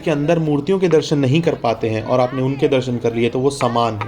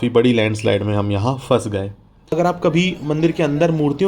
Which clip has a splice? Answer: second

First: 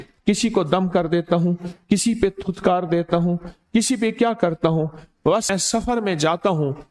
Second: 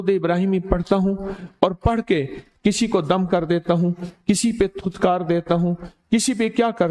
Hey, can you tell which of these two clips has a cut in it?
first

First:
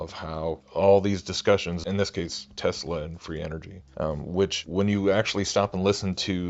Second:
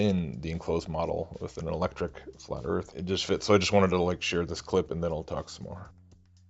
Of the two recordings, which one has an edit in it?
second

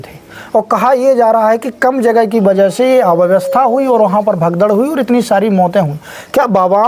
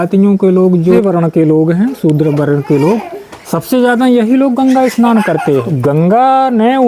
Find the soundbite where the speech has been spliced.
second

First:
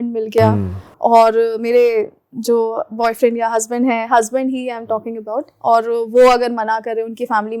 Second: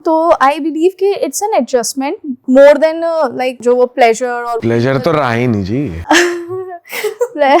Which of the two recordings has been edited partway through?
second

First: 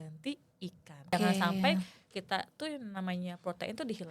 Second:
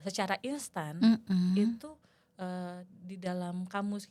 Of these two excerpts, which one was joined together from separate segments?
first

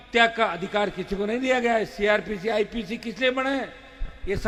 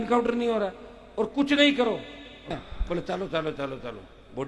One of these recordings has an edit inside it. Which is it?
second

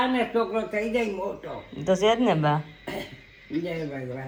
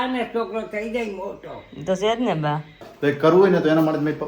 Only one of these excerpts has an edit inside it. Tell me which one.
second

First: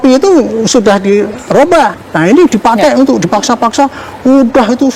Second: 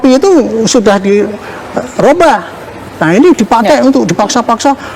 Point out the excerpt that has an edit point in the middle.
first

